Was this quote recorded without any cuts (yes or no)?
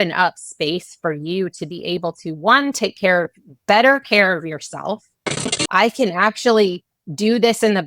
no